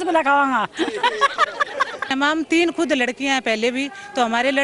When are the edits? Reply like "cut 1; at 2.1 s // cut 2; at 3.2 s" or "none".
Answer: cut 1; at 2.1 s